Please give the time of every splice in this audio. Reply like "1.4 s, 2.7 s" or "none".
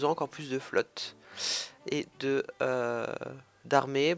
3.0 s